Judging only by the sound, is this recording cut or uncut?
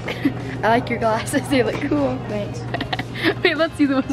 uncut